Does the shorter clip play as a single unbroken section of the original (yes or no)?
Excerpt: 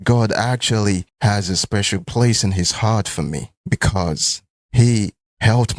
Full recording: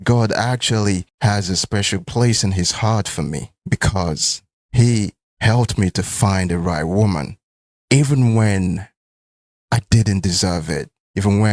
yes